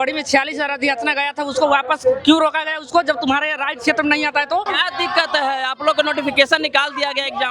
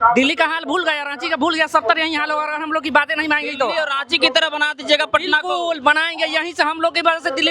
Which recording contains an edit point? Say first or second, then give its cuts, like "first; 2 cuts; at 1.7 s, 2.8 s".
first; 1 cut; at 4.7 s